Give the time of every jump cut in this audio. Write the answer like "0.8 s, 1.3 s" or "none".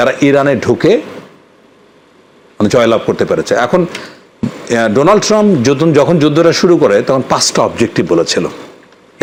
none